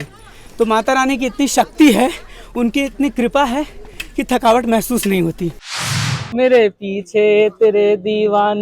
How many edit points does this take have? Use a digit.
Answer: 1